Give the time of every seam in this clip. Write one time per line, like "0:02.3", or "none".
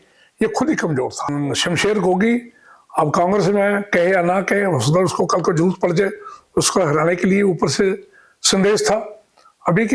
0:01.3

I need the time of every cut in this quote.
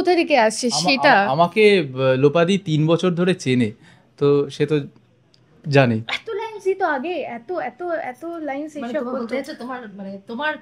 none

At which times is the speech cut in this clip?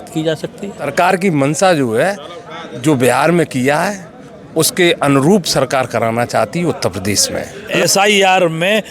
0:00.9
0:07.7

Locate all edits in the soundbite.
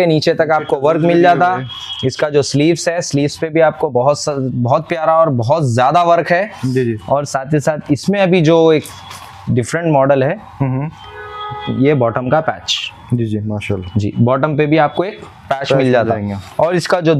none

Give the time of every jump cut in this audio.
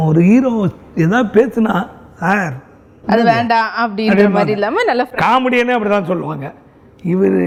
none

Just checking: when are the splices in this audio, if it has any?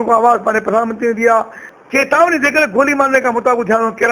0:01.6

